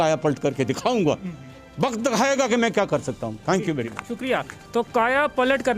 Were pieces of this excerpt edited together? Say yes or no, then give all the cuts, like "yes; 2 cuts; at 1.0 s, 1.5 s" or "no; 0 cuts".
no; 0 cuts